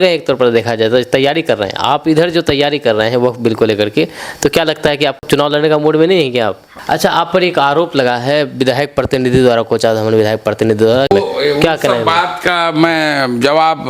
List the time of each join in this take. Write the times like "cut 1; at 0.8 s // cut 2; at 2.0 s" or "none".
cut 1; at 5.2 s // cut 2; at 6.7 s